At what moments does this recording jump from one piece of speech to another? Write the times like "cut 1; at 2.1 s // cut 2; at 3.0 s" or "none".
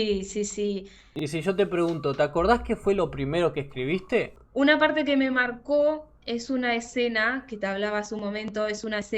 cut 1; at 1.1 s // cut 2; at 4.4 s